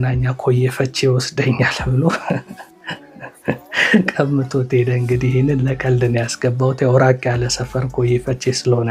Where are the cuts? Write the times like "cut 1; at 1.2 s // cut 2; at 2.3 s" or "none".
none

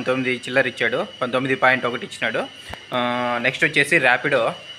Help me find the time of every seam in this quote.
none

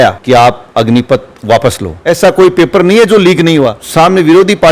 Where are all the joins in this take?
cut 1; at 1.9 s // cut 2; at 3.8 s

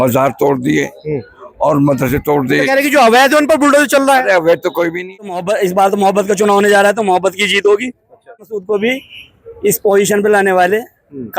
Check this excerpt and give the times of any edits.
cut 1; at 5.4 s // cut 2; at 8.4 s

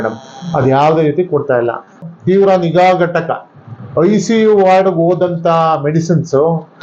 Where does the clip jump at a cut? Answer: cut 1; at 2.0 s

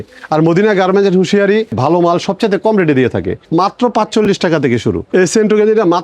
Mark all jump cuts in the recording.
cut 1; at 1.8 s // cut 2; at 3.4 s // cut 3; at 5.1 s

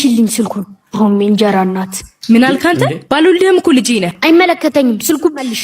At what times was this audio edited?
cut 1; at 4.1 s

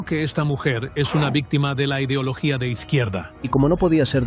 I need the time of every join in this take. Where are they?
cut 1; at 3.3 s

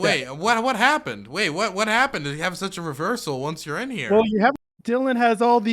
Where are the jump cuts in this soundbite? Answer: cut 1; at 4.6 s

